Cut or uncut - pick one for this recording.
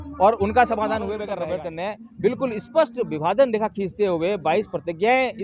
cut